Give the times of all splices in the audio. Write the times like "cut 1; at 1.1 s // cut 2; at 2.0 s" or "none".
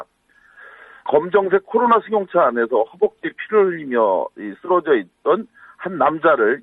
cut 1; at 4.7 s